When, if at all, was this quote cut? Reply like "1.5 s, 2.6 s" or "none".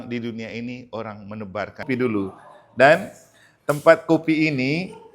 1.8 s

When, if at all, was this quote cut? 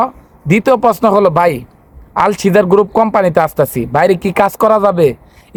none

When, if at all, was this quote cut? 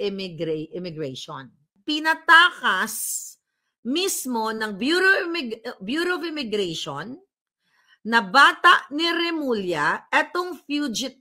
1.7 s

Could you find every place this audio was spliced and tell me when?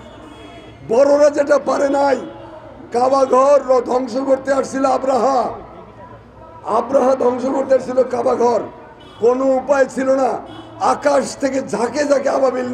none

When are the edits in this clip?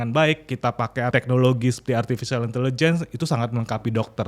1.1 s

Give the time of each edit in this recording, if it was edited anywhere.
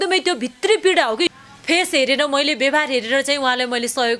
1.3 s

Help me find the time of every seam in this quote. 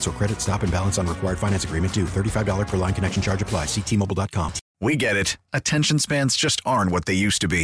4.6 s

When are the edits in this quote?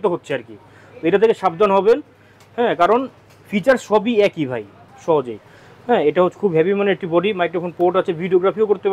4.9 s

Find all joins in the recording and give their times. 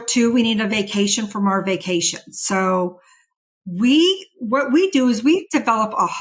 none

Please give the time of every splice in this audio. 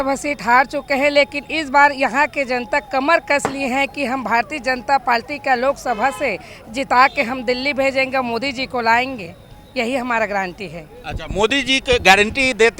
none

